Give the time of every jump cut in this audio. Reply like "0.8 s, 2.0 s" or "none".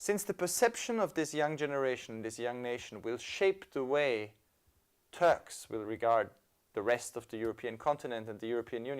6.9 s